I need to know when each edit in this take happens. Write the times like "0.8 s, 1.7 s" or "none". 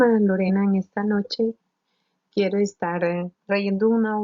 3.3 s